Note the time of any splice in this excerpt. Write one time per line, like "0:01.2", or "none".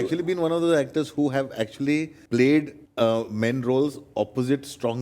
0:02.2
0:02.8